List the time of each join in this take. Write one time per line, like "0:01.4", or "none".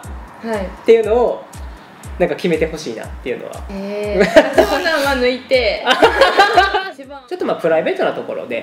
0:06.9